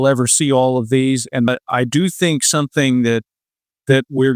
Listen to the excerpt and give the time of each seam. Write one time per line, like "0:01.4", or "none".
0:01.5